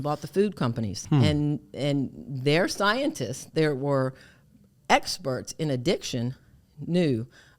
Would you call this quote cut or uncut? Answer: cut